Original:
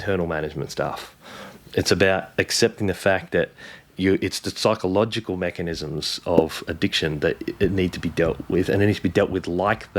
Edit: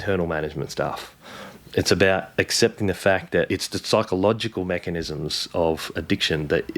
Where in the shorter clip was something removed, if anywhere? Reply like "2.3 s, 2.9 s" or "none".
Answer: 3.5 s